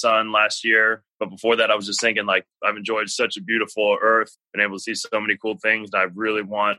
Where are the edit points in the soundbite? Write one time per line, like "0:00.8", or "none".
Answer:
0:01.0
0:02.5
0:04.3